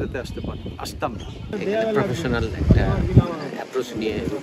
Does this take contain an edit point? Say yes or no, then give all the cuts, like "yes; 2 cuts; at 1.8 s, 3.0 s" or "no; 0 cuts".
yes; 1 cut; at 1.5 s